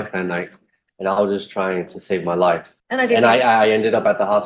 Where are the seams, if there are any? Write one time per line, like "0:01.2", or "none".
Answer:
0:02.7